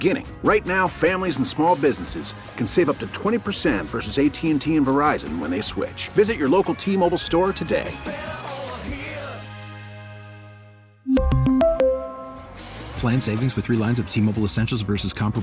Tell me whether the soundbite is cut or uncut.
uncut